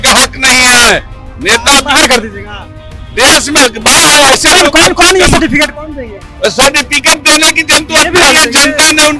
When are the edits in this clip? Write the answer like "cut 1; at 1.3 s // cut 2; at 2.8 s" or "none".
none